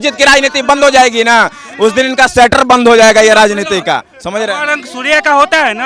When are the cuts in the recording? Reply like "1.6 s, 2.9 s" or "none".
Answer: none